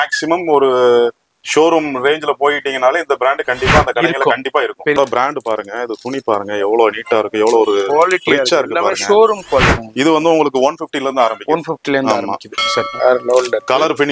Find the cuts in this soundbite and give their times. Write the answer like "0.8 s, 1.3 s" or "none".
5.0 s, 9.8 s, 12.9 s